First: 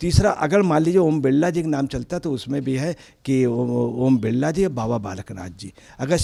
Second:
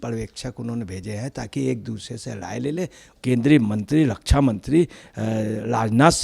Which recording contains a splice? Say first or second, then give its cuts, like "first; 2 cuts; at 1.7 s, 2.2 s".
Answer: second; 1 cut; at 3.1 s